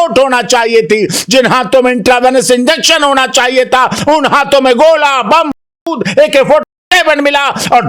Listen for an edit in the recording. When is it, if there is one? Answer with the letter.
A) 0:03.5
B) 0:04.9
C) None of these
C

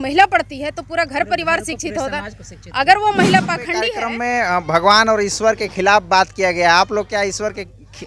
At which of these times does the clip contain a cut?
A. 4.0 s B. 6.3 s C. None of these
A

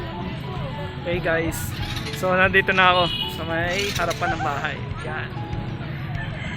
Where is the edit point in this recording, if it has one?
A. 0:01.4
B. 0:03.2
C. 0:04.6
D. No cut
D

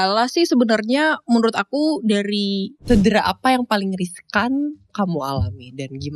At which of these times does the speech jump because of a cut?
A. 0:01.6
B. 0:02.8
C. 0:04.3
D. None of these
B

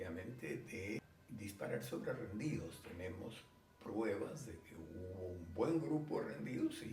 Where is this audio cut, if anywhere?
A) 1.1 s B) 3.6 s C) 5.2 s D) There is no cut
A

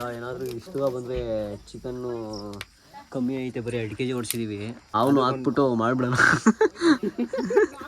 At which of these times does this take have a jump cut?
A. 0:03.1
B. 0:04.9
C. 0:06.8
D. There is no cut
B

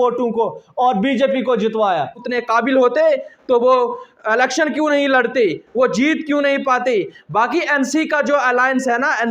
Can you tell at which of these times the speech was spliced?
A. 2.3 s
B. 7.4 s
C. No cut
A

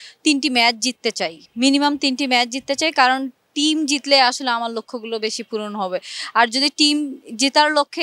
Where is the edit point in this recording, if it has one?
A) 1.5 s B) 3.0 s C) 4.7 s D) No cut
D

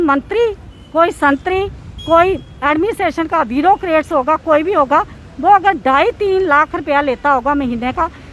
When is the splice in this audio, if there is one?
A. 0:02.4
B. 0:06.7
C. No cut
C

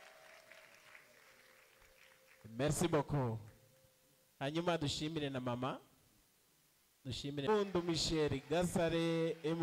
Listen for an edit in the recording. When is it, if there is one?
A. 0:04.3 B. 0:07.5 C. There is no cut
B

